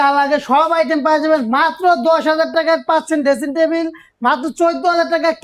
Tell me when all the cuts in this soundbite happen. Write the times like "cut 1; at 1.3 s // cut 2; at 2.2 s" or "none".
none